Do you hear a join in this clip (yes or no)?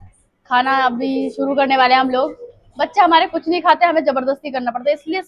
no